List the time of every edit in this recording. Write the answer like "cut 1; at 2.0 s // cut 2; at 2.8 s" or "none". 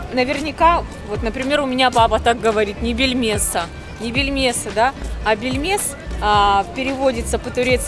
none